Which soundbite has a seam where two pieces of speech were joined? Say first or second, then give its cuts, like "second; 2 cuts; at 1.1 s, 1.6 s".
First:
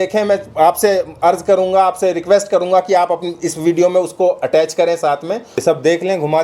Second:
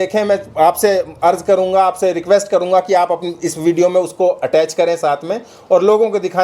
first; 1 cut; at 5.5 s